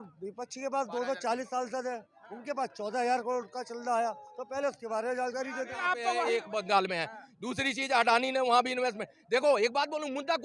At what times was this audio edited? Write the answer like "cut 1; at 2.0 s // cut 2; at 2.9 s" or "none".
cut 1; at 6.0 s

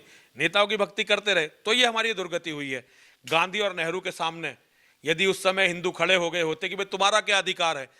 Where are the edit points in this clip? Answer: none

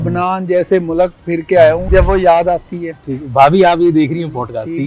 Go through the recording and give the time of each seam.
cut 1; at 1.8 s

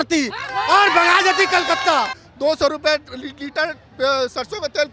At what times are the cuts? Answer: cut 1; at 2.2 s

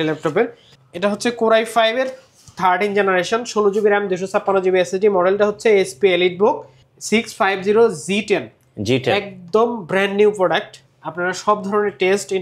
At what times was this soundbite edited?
none

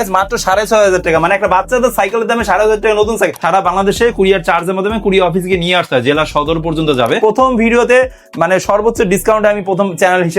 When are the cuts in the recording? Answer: cut 1; at 3.4 s // cut 2; at 7.2 s

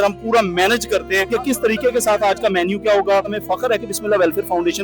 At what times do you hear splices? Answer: cut 1; at 1.3 s // cut 2; at 3.4 s

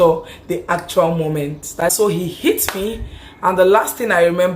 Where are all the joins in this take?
cut 1; at 1.6 s

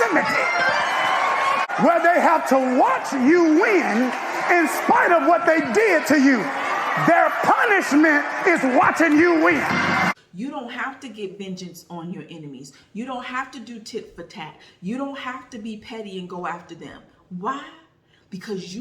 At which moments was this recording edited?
cut 1; at 1.7 s // cut 2; at 10.1 s

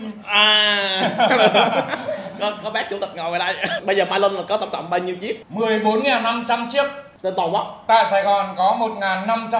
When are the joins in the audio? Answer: cut 1; at 3.8 s // cut 2; at 5.4 s // cut 3; at 7.0 s

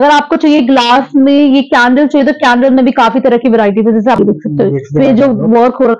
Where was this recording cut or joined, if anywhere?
cut 1; at 4.2 s

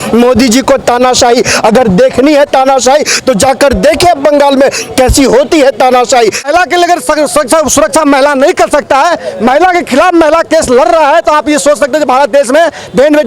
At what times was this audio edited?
cut 1; at 6.5 s

